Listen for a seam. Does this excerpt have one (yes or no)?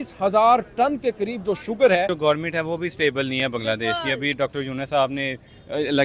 yes